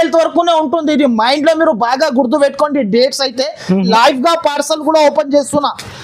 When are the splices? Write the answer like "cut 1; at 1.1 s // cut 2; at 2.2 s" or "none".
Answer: cut 1; at 3.9 s